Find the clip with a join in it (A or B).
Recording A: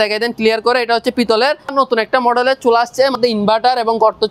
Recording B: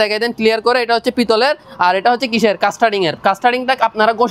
A